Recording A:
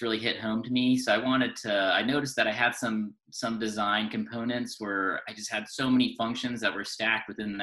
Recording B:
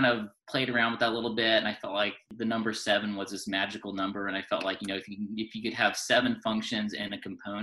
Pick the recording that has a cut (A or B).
B